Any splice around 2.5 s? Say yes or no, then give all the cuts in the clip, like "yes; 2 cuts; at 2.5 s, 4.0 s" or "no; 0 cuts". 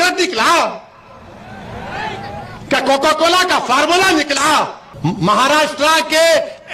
no; 1 cut; at 4.8 s